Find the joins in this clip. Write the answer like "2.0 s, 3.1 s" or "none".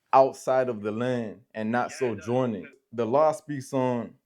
2.8 s